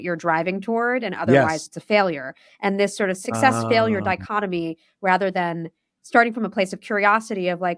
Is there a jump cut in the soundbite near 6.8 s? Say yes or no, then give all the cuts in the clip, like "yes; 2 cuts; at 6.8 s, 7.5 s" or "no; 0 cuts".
no; 1 cut; at 3.2 s